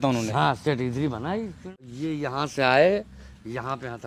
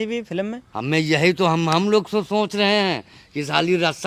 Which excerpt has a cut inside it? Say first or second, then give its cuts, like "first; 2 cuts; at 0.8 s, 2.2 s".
first; 1 cut; at 1.8 s